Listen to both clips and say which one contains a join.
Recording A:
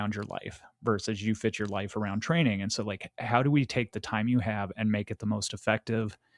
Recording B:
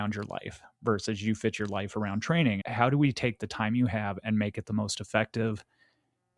B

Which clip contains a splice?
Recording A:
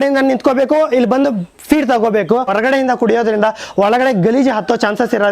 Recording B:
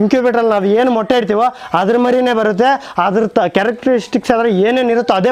A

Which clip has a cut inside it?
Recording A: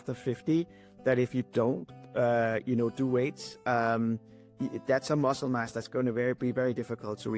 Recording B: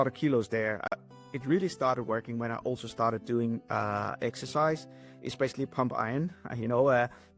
B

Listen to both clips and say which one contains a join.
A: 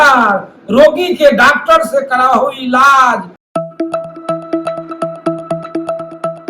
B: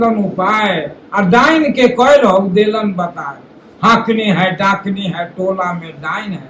A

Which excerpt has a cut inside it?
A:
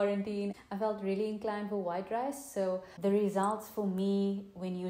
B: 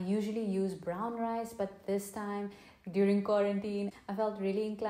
A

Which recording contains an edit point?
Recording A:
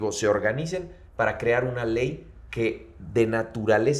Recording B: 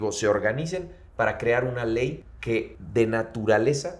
B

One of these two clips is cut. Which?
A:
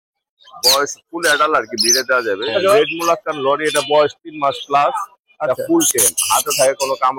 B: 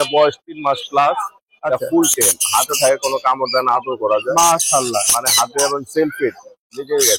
A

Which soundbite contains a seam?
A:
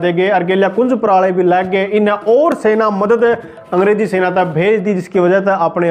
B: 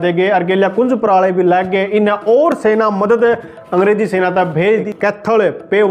B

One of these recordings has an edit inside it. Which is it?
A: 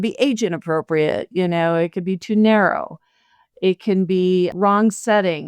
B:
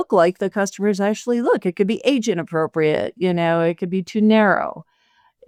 A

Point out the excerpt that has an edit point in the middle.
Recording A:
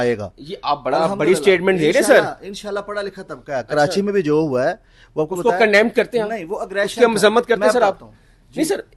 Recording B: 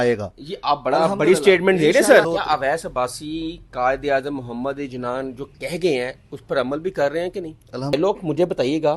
B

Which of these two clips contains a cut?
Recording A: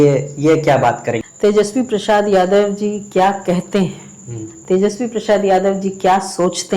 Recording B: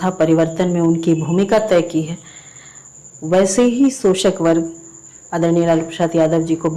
A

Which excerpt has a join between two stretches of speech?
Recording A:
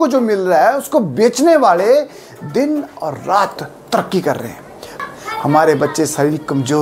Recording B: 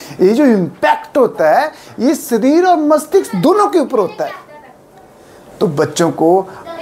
A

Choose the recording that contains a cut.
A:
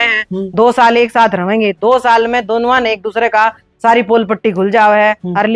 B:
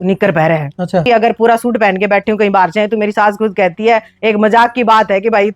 B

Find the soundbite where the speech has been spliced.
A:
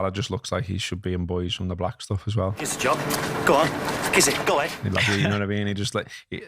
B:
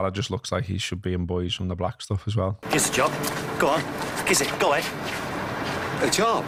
A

